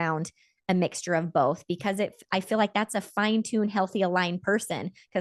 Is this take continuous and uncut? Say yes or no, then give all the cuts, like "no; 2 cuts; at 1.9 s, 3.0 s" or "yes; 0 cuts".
yes; 0 cuts